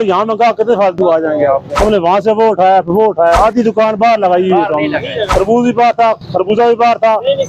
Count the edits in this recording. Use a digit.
3